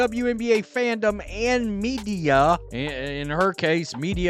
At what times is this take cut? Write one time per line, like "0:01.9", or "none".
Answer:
0:02.7